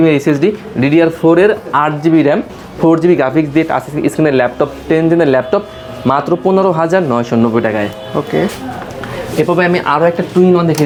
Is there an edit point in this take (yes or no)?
no